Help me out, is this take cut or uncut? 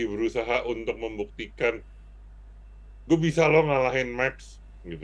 uncut